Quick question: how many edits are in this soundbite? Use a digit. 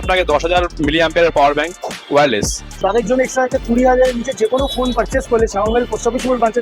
1